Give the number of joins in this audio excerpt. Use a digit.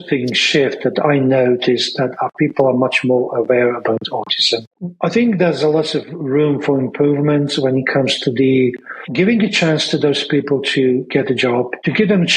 1